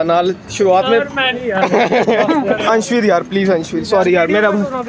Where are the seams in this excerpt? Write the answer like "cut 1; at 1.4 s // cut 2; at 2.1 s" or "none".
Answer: cut 1; at 2.6 s